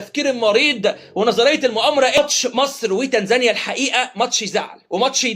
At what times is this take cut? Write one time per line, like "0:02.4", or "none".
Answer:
0:02.1